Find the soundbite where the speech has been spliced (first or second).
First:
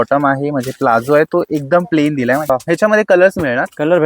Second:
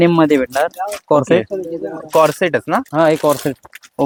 first